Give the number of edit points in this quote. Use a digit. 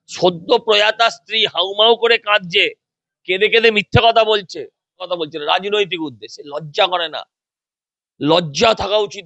1